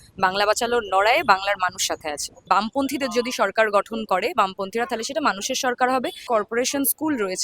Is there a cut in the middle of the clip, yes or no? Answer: yes